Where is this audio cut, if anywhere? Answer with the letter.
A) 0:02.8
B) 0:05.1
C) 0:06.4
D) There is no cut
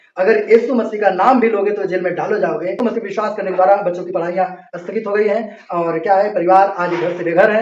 A